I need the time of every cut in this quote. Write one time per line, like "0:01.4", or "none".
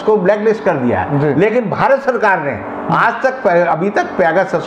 none